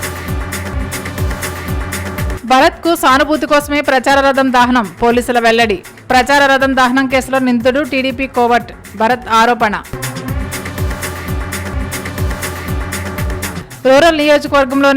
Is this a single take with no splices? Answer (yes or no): no